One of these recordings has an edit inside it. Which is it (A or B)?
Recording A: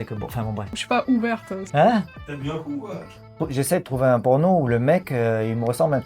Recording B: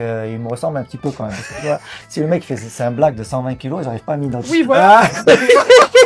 A